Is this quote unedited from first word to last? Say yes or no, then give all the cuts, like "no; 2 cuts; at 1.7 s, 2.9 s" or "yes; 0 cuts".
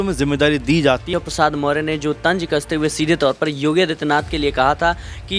no; 1 cut; at 1.1 s